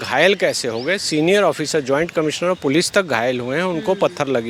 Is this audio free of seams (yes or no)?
yes